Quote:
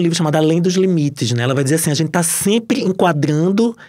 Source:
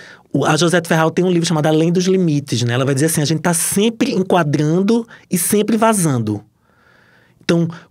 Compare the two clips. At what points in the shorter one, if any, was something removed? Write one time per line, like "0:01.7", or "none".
none